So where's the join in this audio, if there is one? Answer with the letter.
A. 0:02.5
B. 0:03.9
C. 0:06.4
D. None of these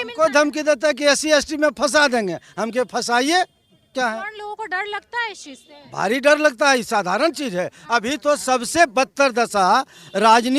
B